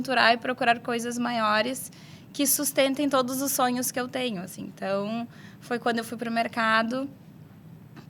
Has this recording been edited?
no; 0 cuts

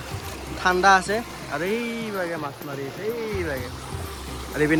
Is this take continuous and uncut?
yes; 0 cuts

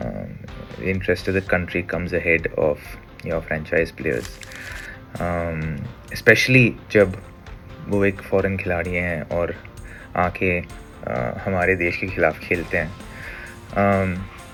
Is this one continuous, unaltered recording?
yes; 0 cuts

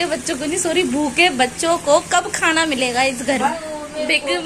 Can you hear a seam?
yes; 1 cut; at 3.5 s

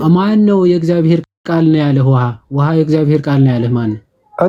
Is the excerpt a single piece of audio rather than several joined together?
yes; 0 cuts

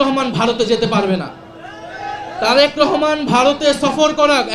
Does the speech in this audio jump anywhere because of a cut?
no; 0 cuts

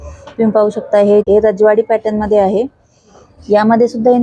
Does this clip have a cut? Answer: no; 0 cuts

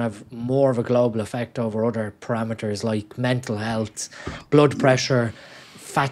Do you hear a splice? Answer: no; 0 cuts

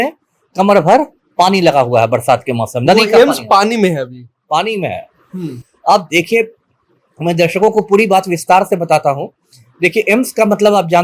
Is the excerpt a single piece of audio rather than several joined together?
yes; 0 cuts

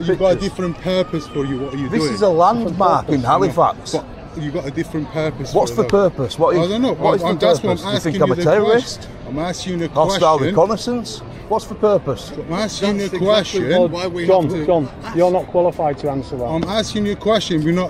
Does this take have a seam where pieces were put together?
no; 0 cuts

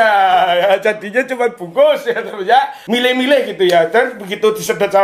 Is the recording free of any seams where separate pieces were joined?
no; 1 cut; at 2.9 s

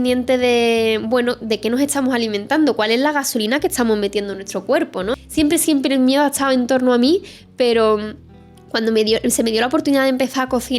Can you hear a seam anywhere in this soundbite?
yes; 1 cut; at 5.2 s

